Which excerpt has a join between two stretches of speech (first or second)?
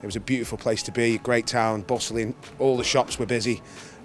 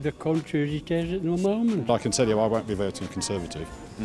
second